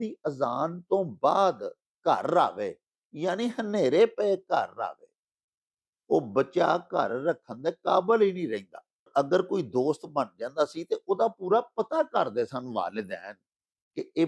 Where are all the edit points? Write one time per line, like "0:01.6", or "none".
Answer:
0:09.1